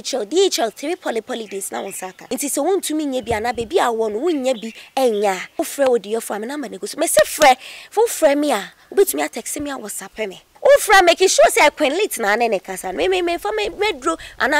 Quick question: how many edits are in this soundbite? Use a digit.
3